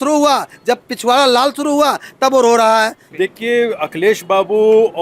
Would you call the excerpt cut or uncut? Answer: cut